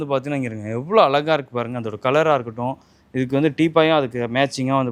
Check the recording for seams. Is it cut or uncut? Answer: uncut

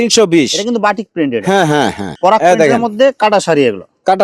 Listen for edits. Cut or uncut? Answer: cut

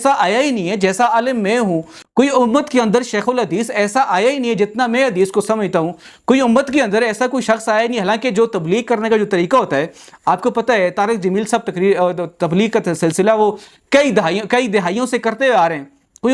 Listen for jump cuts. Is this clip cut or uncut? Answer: uncut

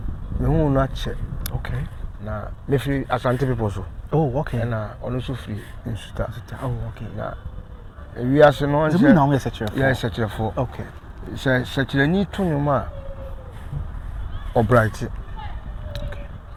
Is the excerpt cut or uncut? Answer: uncut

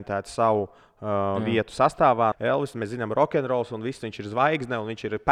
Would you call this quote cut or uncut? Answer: cut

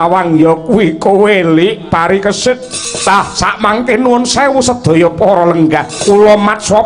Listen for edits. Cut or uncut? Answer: cut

